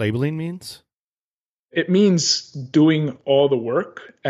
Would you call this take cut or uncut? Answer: cut